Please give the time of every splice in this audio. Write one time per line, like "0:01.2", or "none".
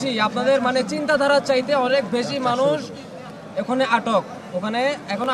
none